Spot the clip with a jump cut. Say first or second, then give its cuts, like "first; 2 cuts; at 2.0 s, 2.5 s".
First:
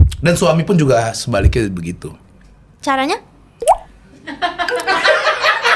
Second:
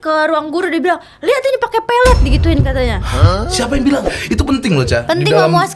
second; 1 cut; at 4.2 s